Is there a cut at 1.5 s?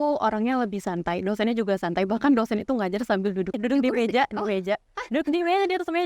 no; 1 cut; at 3.6 s

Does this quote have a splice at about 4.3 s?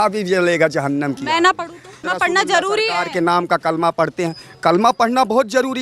no; 1 cut; at 2.0 s

